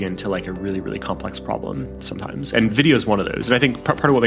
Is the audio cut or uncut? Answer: uncut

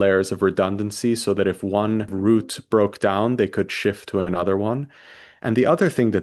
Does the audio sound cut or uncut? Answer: cut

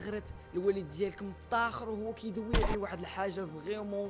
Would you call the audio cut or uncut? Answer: cut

